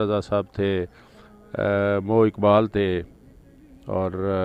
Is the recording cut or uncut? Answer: uncut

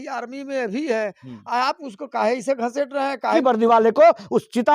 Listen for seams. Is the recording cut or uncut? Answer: cut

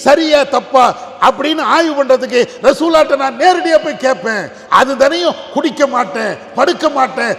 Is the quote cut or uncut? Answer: uncut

